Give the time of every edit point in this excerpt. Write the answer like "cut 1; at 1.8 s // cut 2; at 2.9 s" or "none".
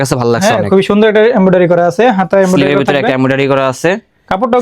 none

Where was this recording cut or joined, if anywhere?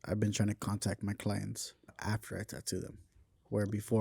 cut 1; at 2.0 s

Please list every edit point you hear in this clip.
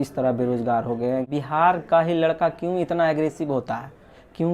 cut 1; at 1.3 s

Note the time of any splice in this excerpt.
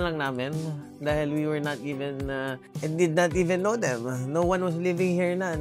cut 1; at 2.7 s

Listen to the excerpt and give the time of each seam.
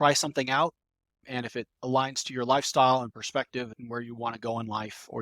cut 1; at 1.2 s // cut 2; at 3.8 s

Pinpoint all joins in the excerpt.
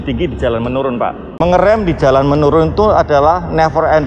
cut 1; at 1.2 s

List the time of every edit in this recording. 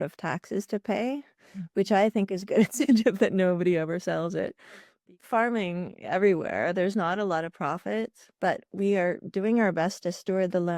cut 1; at 4.9 s

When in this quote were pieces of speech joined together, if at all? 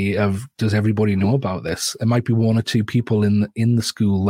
none

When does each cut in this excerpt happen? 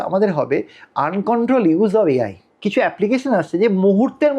cut 1; at 2.5 s

